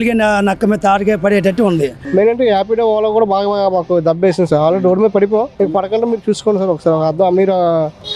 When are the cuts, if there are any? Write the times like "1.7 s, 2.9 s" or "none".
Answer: 2.0 s